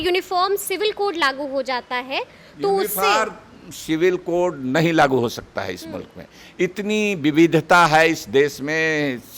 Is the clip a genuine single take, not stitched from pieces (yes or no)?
yes